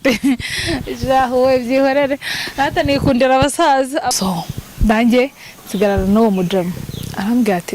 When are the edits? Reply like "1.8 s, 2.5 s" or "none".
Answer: 4.1 s